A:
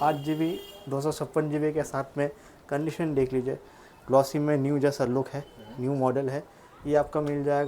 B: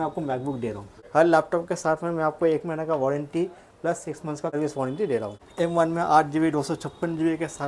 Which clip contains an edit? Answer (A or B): B